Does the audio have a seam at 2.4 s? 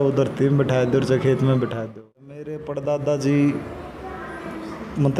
yes; 1 cut; at 2.4 s

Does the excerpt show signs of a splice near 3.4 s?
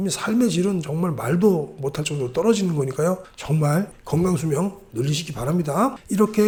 no; 0 cuts

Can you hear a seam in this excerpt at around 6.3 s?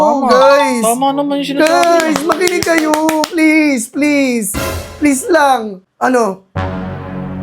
yes; 1 cut; at 6.3 s

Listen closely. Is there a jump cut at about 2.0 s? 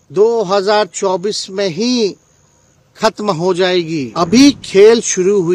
no; 1 cut; at 4.1 s

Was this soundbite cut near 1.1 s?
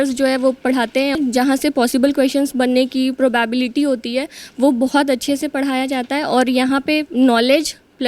yes; 1 cut; at 1.1 s

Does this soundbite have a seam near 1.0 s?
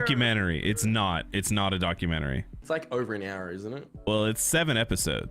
no; 2 cuts; at 2.5 s, 3.9 s

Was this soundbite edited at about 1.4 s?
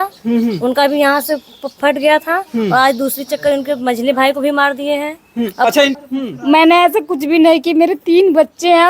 no; 1 cut; at 6.0 s

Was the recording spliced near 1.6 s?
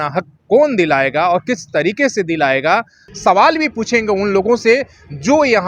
no; 1 cut; at 3.0 s

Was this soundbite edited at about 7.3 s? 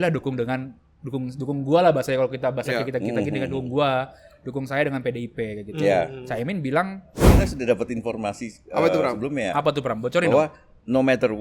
yes; 1 cut; at 7.3 s

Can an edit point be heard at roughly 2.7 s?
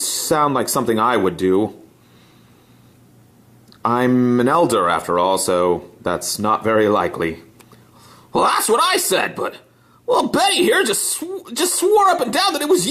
no; 1 cut; at 1.1 s

